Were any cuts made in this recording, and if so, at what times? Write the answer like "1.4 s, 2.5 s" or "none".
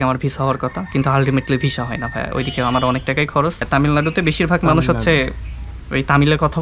3.6 s